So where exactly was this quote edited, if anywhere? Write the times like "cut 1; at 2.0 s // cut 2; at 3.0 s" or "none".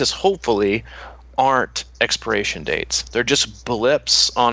none